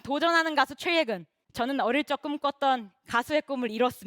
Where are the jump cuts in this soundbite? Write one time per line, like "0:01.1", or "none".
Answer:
0:01.4